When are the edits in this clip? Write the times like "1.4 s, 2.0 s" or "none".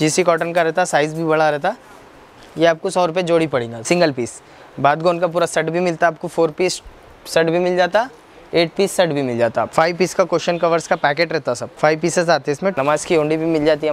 3.7 s, 9.7 s, 11.7 s, 12.7 s